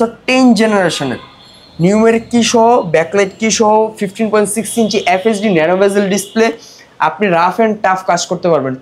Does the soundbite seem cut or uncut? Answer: uncut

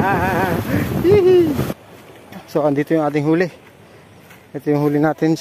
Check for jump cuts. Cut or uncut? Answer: cut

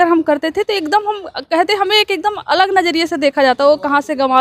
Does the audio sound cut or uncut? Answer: uncut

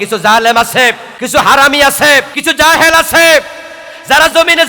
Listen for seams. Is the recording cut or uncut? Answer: cut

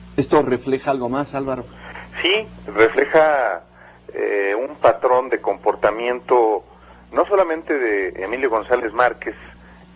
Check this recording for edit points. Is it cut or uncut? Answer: cut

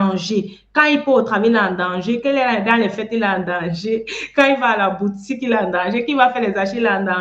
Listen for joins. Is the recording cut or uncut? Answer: uncut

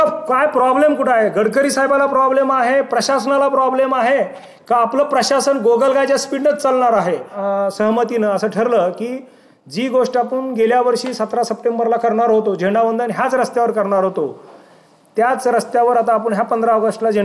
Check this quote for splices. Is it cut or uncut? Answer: cut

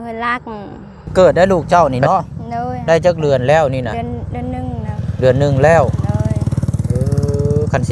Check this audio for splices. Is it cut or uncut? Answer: cut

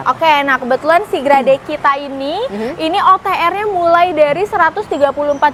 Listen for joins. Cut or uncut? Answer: uncut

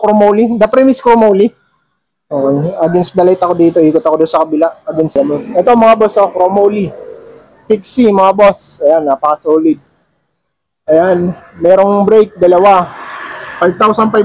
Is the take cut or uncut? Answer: cut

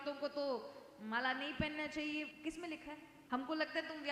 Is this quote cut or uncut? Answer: cut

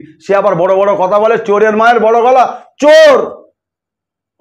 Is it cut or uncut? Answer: uncut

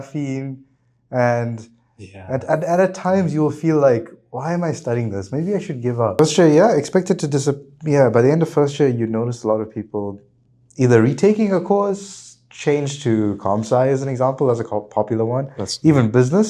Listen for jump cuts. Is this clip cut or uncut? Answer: cut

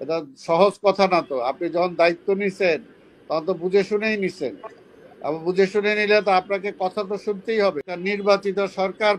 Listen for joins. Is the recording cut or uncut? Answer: cut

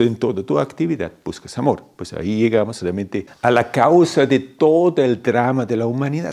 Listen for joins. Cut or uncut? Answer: cut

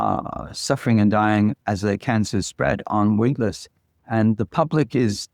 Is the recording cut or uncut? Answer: uncut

